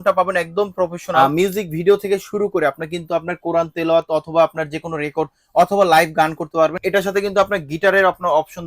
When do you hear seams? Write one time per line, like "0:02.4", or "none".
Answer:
0:01.0
0:06.8